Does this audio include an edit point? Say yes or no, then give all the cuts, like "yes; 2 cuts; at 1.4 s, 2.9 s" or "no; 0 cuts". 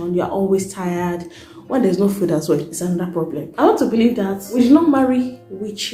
yes; 3 cuts; at 1.5 s, 3.5 s, 4.4 s